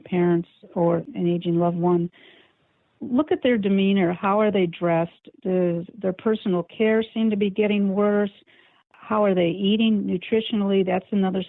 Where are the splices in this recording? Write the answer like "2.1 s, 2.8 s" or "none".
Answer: 1.1 s